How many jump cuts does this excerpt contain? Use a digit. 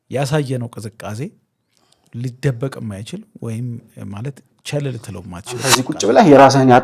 1